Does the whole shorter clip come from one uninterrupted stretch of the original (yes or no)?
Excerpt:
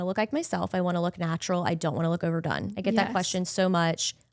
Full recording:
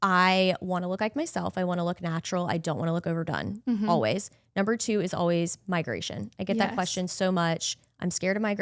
no